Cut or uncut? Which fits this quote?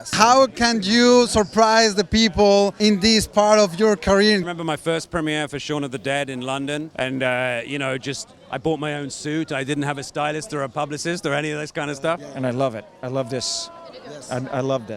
cut